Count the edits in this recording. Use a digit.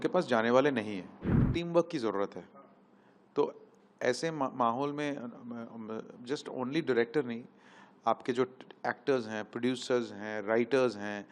1